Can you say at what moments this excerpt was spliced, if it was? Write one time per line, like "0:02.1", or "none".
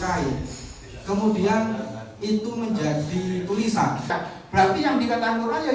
0:04.1

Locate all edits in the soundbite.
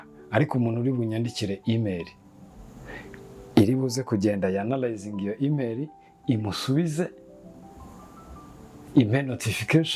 none

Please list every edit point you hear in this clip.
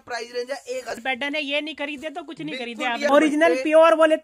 0:01.0
0:03.1

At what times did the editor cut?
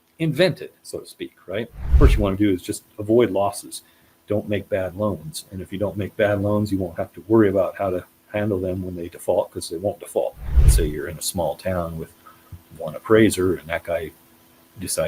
0:01.9
0:10.6

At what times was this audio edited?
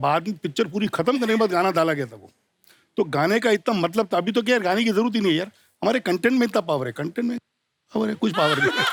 none

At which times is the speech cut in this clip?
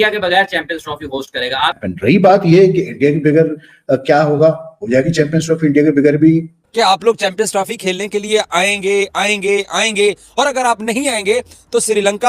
0:01.8
0:06.6

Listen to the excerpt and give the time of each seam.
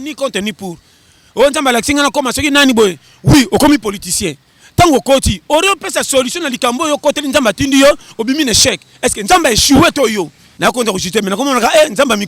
0:10.4

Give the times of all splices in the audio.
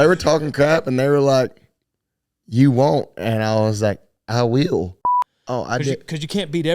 0:05.0

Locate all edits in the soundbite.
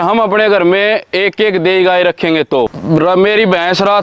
0:02.7

